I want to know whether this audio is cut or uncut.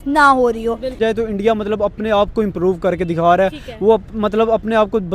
cut